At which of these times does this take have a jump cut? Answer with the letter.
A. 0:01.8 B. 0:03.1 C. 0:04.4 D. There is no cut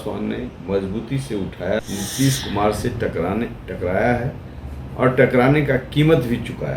A